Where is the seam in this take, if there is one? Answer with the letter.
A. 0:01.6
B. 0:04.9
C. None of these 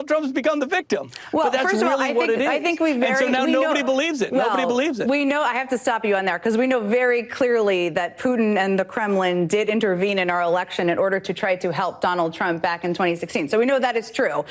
A